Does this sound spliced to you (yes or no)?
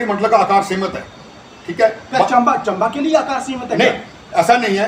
no